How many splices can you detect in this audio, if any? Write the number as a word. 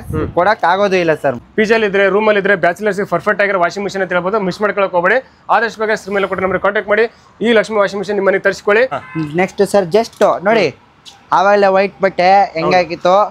two